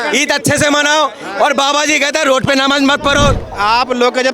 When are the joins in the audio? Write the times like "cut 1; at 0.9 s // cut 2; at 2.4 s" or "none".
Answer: cut 1; at 3.4 s